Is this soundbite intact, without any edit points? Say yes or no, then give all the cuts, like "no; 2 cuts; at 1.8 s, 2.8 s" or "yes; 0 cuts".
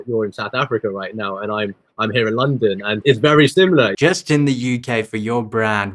no; 2 cuts; at 3.0 s, 3.9 s